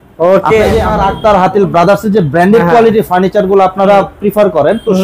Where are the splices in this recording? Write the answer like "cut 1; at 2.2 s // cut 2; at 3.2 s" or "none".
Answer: cut 1; at 0.9 s